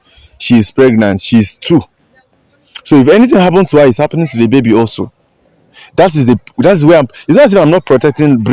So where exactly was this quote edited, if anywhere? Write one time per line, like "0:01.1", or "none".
none